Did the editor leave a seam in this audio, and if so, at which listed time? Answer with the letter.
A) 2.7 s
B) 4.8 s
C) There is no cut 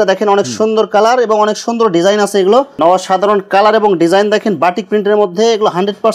A